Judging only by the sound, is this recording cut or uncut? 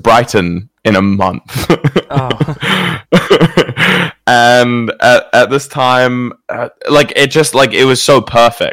uncut